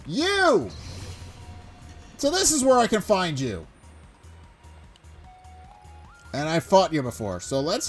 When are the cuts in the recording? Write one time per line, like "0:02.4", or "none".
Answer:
0:00.7
0:02.2
0:03.7
0:05.9